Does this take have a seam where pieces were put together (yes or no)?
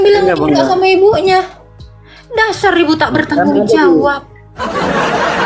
no